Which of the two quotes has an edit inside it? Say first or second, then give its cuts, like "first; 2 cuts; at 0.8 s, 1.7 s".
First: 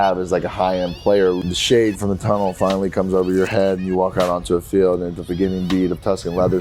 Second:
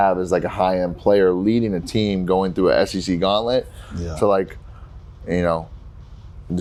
first; 2 cuts; at 1.4 s, 5.2 s